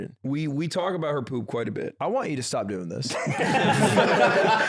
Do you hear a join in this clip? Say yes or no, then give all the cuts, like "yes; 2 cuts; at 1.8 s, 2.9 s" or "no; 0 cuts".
no; 0 cuts